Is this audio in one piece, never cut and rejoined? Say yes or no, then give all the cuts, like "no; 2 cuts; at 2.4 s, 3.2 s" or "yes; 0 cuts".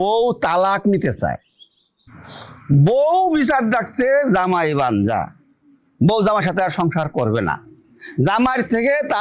yes; 0 cuts